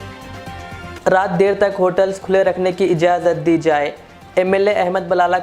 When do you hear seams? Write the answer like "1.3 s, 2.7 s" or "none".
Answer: 1.0 s